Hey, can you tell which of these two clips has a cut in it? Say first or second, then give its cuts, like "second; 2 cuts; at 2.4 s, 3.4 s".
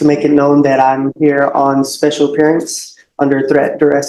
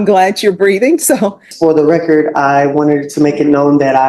second; 1 cut; at 1.5 s